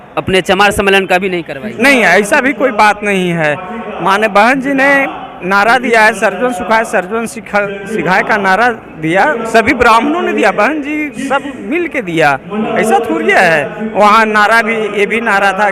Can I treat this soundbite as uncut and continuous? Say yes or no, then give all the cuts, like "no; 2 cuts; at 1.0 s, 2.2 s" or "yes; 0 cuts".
yes; 0 cuts